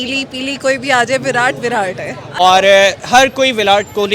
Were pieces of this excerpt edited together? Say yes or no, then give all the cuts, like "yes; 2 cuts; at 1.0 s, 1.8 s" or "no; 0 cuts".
yes; 1 cut; at 2.4 s